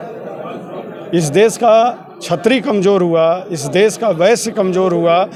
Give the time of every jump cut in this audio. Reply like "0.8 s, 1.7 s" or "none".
none